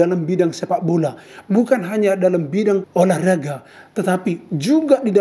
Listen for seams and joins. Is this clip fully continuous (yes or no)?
no